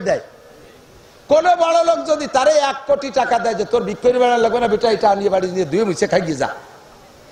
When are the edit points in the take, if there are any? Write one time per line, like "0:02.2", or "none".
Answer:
none

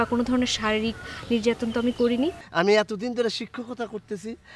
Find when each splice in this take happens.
0:02.4

